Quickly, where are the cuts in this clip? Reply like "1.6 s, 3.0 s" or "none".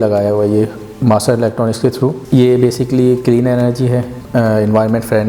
2.2 s, 4.2 s